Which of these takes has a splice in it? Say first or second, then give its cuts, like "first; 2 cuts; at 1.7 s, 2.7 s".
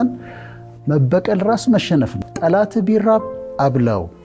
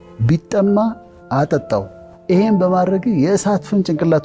first; 1 cut; at 2.2 s